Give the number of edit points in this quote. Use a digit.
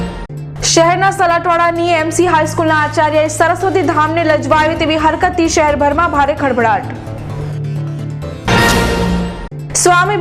0